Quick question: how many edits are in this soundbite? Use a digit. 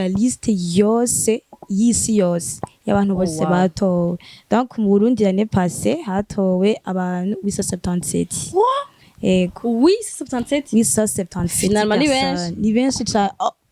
0